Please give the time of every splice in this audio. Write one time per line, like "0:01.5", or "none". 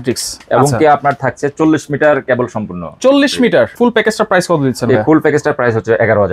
0:03.7

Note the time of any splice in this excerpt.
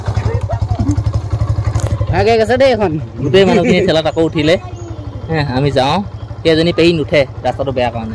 0:02.1

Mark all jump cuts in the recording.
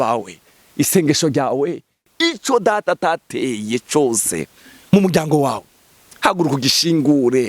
0:02.1

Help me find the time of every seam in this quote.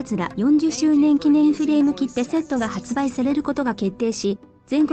0:02.2
0:04.0

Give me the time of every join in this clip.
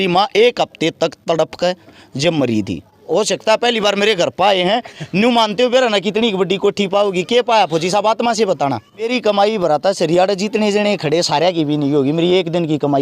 0:03.0
0:09.1

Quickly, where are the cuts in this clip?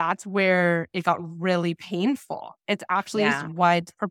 none

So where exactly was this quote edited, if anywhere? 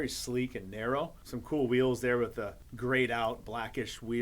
0:01.2
0:02.6

